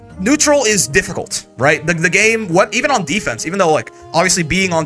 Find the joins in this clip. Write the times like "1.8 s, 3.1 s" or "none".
none